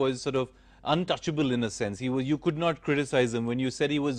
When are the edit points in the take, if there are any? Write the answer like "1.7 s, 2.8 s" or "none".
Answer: none